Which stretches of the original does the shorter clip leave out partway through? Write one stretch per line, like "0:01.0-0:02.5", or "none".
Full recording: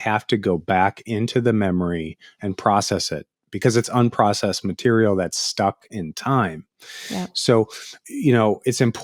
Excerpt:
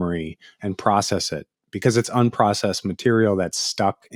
none